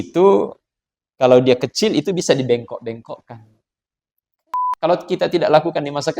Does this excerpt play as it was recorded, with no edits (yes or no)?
no